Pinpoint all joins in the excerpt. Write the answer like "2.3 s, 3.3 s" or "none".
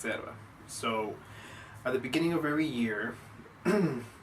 none